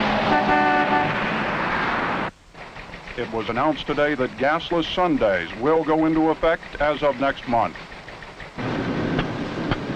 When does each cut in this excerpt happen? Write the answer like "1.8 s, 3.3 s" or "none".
7.3 s